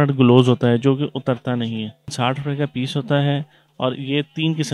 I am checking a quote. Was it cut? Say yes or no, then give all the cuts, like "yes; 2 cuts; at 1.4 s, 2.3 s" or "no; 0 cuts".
yes; 1 cut; at 2.1 s